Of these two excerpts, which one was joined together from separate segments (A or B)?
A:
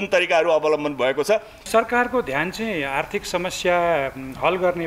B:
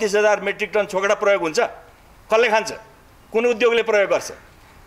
A